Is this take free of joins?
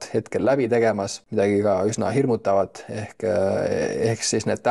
no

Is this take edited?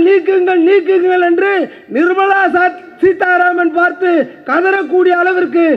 no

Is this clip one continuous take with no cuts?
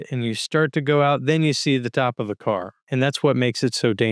no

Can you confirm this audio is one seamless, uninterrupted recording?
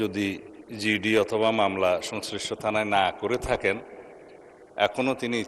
yes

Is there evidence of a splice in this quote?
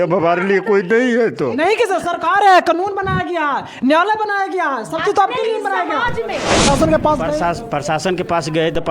yes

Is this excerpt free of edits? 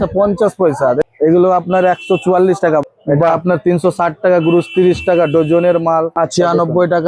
no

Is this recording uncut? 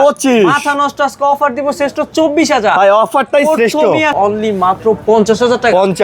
no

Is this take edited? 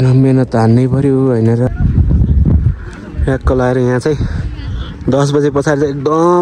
yes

